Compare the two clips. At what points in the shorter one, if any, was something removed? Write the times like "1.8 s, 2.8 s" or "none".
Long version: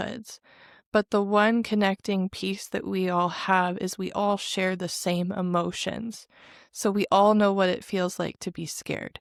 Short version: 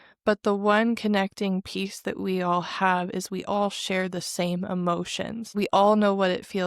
5.5 s